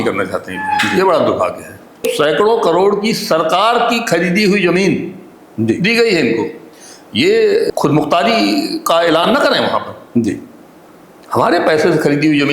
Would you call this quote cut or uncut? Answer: cut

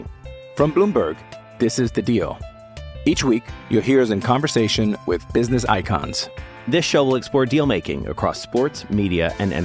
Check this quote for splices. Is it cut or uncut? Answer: uncut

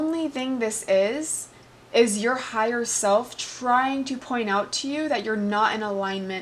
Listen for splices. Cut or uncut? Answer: uncut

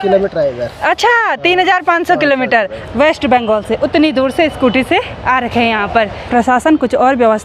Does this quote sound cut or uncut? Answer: cut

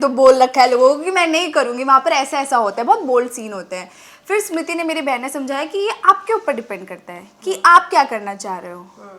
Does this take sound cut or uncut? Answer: uncut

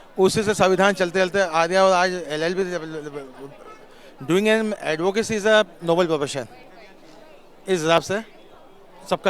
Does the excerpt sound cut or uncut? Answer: uncut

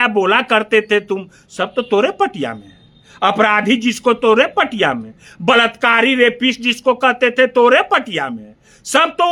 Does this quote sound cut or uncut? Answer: uncut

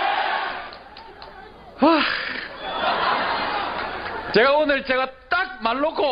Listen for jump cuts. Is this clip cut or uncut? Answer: uncut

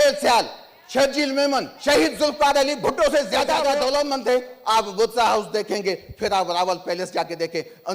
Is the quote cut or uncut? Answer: cut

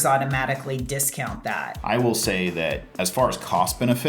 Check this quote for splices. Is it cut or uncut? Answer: cut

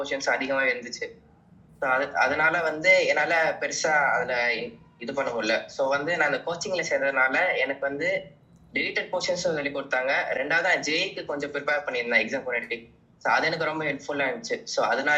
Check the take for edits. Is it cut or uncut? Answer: uncut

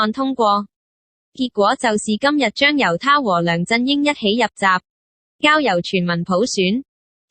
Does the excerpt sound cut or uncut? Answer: cut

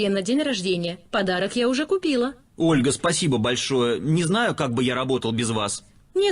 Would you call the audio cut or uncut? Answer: cut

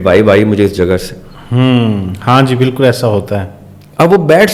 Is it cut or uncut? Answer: uncut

